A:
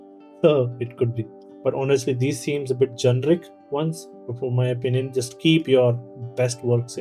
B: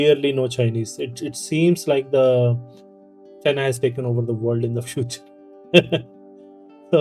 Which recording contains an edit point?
A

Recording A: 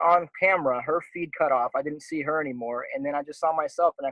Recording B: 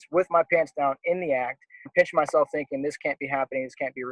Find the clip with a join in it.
B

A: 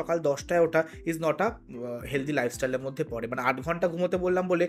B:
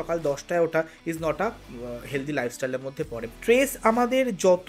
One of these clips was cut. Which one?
B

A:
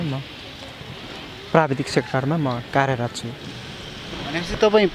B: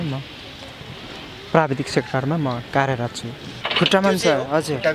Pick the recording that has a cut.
B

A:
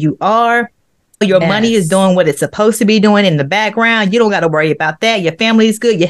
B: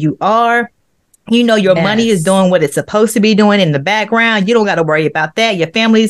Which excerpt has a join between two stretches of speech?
A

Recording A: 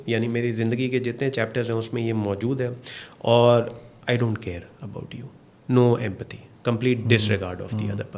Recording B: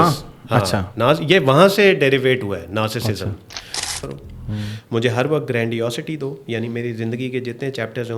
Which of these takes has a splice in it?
B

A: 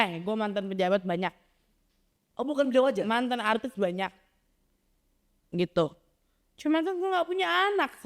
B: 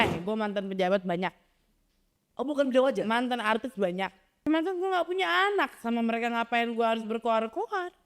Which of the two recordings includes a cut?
B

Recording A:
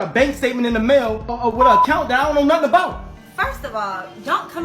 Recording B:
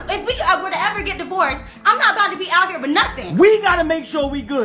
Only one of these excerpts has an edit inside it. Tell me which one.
B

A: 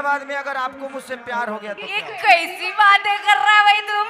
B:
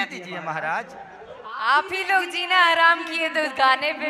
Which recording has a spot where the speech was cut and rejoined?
A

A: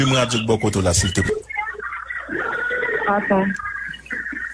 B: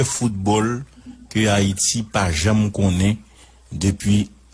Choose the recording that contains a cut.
A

